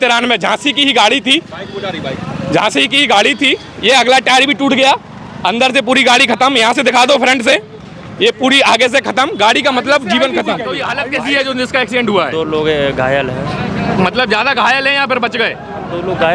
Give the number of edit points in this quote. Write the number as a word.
one